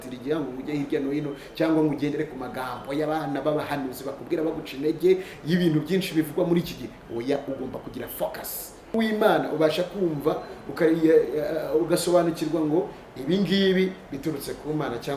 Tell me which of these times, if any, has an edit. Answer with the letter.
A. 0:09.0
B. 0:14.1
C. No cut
A